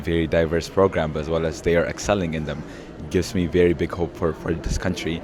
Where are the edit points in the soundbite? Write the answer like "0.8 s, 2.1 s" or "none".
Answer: none